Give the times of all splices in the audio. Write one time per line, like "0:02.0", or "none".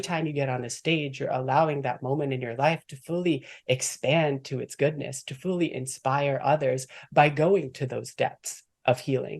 none